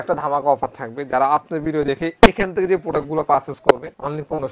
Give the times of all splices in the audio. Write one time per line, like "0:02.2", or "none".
none